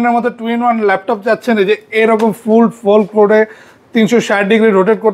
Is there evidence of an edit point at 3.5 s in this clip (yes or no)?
no